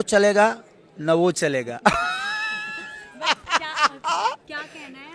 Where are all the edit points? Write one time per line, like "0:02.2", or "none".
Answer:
none